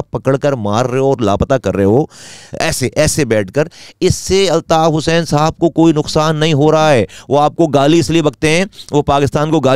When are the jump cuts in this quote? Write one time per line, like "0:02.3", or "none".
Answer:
none